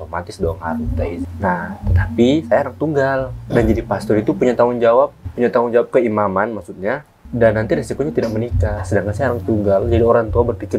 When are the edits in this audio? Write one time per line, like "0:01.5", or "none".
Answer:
0:01.3
0:05.2
0:07.2

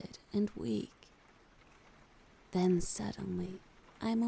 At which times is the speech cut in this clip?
0:00.9
0:02.5

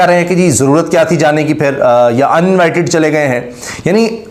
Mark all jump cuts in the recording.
none

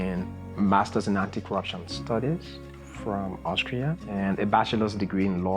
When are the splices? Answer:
0:04.1

